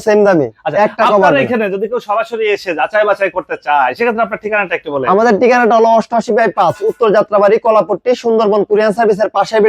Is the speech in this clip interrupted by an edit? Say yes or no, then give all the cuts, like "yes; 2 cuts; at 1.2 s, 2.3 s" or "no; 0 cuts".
no; 0 cuts